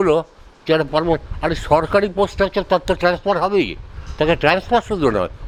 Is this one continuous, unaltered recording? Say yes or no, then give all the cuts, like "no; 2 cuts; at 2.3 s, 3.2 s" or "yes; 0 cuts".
yes; 0 cuts